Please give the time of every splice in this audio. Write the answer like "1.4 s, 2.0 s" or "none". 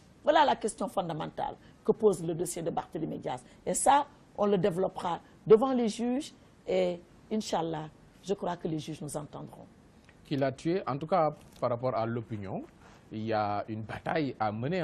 none